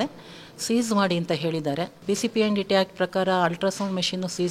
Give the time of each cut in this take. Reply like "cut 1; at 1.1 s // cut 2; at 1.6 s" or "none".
cut 1; at 2.0 s

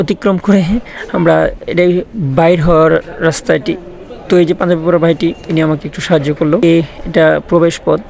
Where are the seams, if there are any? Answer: cut 1; at 6.6 s

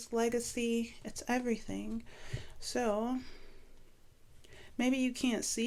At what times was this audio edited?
none

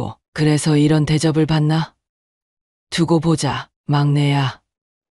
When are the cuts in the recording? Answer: cut 1; at 3.7 s

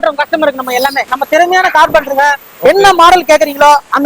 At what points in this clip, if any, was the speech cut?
cut 1; at 1.1 s

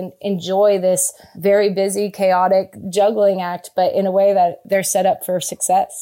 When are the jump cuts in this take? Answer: cut 1; at 4.6 s

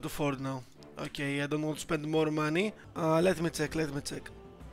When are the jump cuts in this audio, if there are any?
cut 1; at 2.8 s

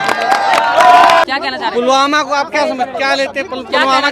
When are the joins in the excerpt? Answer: cut 1; at 1.2 s

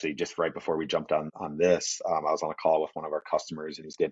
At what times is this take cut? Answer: cut 1; at 1.4 s

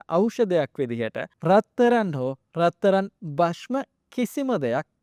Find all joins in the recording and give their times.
cut 1; at 1.3 s

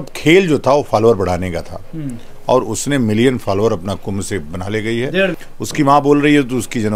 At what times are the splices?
cut 1; at 5.4 s

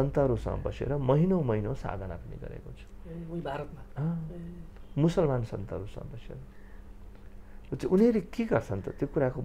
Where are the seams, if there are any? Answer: none

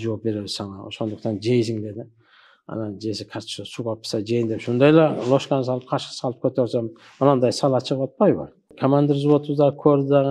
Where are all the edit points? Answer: cut 1; at 8.7 s

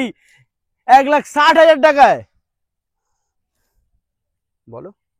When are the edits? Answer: none

